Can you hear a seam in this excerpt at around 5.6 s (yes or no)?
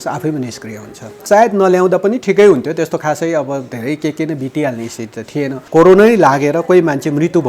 yes